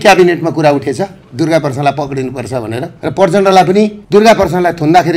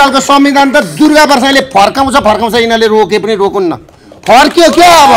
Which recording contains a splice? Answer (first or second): first